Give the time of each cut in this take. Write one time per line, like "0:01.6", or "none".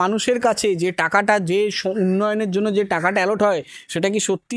none